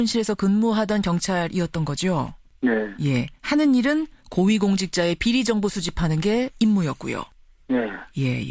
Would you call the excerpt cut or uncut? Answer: cut